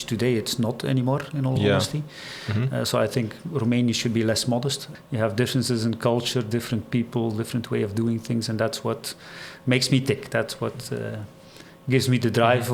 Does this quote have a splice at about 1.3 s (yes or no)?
no